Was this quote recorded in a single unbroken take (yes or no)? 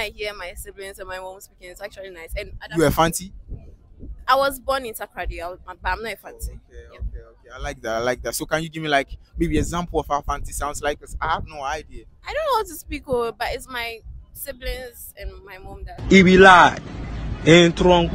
yes